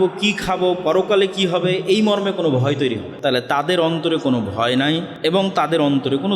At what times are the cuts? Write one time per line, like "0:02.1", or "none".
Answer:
0:03.1
0:05.1